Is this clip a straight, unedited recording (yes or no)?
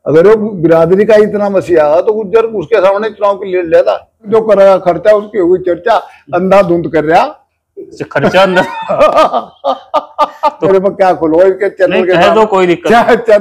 no